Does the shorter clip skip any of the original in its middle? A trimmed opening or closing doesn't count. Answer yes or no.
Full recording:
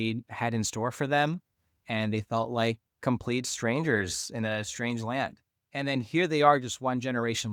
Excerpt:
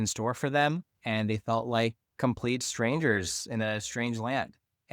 yes